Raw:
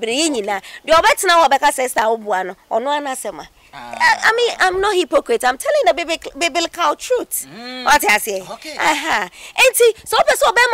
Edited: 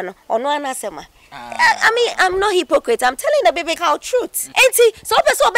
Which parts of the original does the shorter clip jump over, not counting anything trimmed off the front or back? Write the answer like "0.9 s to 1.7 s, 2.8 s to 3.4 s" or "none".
6.5 s to 9.1 s